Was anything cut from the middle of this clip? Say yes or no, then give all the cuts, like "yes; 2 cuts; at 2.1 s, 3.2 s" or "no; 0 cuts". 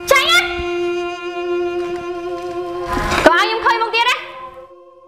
no; 0 cuts